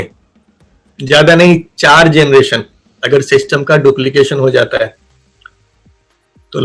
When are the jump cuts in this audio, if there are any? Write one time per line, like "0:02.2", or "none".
none